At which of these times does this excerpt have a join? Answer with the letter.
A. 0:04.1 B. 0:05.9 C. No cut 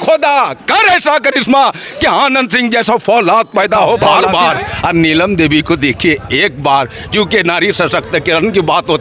A